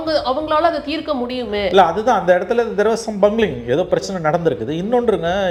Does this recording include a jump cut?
no; 0 cuts

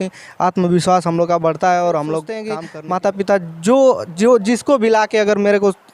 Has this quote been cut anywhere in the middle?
yes; 1 cut; at 2.9 s

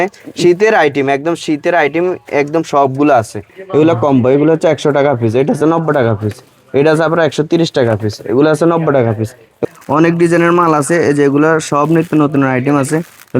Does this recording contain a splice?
yes; 2 cuts; at 3.4 s, 9.6 s

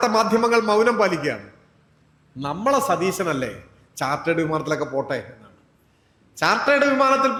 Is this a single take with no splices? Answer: yes; 0 cuts

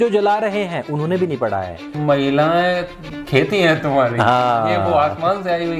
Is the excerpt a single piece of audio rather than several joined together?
no; 1 cut; at 1.9 s

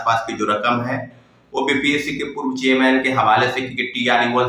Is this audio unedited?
yes; 0 cuts

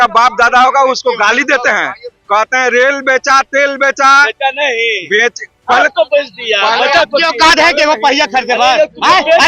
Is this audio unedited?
yes; 0 cuts

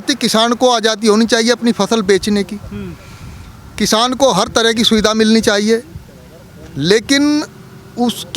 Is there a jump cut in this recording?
no; 0 cuts

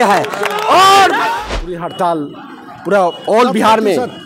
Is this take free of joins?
no; 1 cut; at 1.4 s

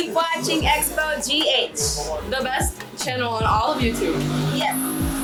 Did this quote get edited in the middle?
no; 0 cuts

